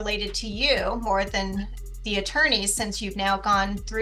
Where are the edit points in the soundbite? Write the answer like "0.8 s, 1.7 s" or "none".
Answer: none